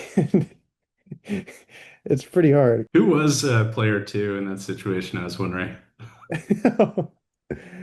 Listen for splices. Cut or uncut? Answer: uncut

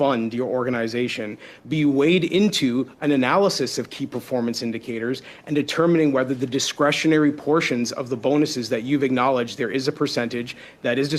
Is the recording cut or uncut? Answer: uncut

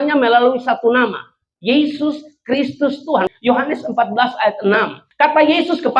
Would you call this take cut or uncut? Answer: cut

